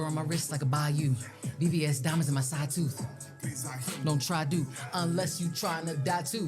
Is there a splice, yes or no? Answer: no